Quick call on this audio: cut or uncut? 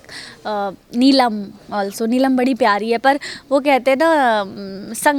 uncut